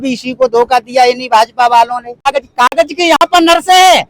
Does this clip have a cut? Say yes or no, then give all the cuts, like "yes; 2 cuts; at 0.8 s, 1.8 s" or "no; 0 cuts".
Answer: yes; 1 cut; at 2.3 s